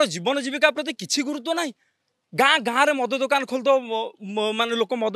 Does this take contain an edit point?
no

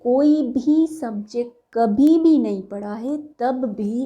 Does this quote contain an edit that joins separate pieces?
yes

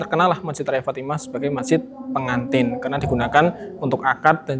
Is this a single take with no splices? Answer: yes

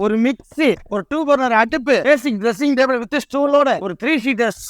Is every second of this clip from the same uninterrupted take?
no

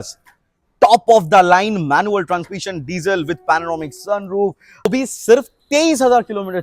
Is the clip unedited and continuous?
no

